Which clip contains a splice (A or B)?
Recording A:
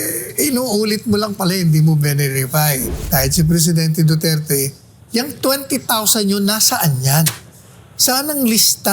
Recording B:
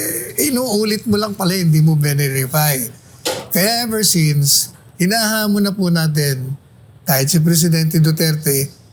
A